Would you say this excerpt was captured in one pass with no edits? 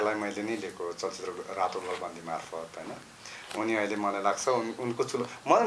yes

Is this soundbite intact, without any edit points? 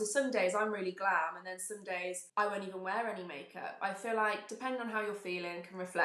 no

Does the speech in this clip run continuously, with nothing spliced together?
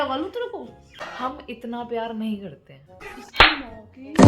no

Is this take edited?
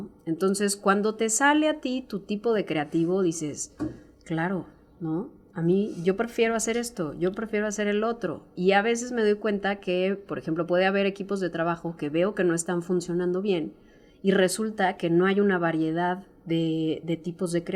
no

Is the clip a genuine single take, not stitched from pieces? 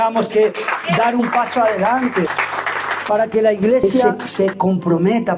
no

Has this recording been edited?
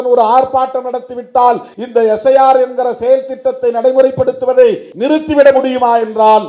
yes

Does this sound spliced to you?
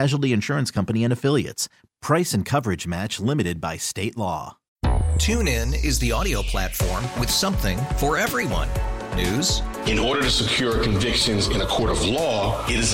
yes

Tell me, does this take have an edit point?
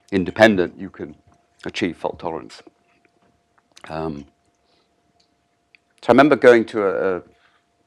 no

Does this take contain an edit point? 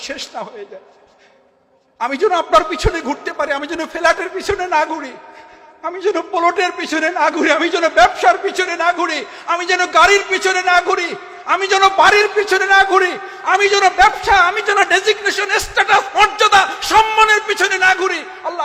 no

